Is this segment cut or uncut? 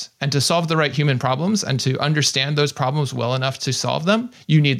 uncut